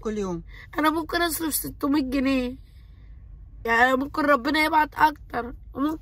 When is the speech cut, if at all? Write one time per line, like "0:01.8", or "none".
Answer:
0:03.5